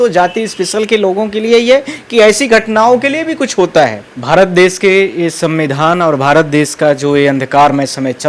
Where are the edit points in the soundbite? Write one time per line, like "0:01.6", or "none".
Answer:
0:04.1